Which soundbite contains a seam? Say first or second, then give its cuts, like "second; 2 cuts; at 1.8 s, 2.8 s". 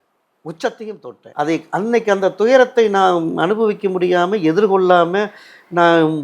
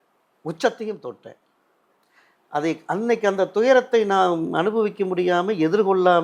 first; 1 cut; at 1.2 s